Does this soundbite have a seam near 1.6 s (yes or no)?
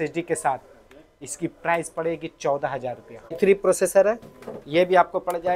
no